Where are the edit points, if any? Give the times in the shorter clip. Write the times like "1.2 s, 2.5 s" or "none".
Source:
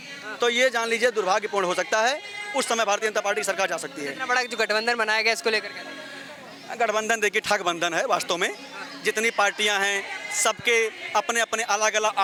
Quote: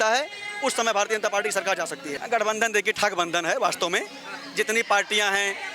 2.1 s